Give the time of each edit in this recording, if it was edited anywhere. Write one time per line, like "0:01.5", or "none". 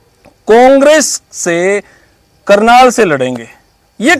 none